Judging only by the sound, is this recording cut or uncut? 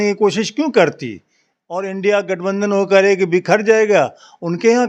uncut